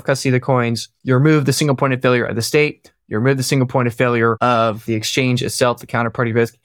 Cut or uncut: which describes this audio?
cut